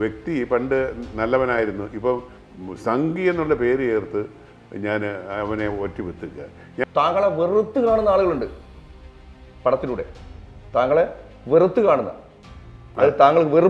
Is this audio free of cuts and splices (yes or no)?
no